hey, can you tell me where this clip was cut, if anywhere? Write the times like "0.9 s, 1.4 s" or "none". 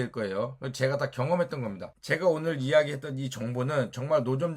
1.9 s